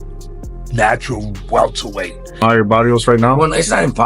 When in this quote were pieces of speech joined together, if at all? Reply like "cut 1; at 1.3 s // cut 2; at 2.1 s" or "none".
cut 1; at 2.4 s

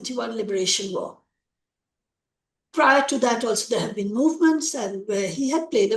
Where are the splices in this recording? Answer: none

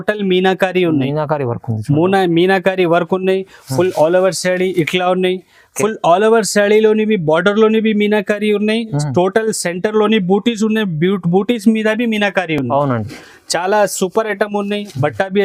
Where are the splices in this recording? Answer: none

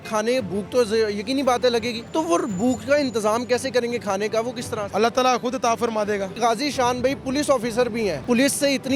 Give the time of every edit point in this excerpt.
cut 1; at 2.0 s // cut 2; at 4.8 s // cut 3; at 6.4 s // cut 4; at 8.2 s

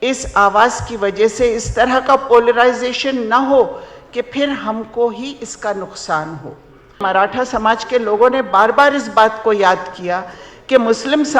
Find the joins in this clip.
cut 1; at 7.0 s

